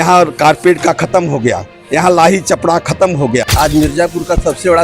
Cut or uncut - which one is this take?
cut